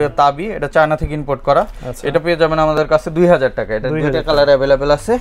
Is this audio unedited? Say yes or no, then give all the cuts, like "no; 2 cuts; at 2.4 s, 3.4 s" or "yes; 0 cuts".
yes; 0 cuts